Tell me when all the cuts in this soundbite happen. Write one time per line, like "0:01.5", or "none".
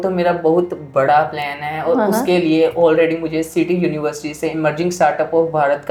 none